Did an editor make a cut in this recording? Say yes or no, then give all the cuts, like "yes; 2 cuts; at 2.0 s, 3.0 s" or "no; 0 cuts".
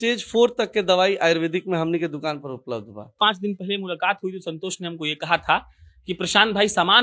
yes; 1 cut; at 3.2 s